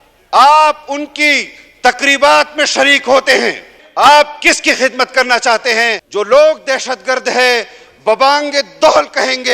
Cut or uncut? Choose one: cut